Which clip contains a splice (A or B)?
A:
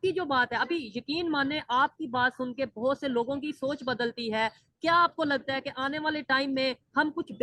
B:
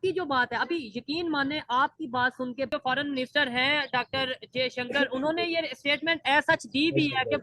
B